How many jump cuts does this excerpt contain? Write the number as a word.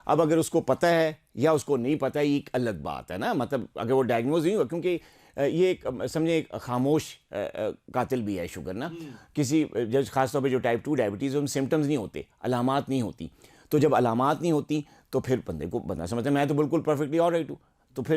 zero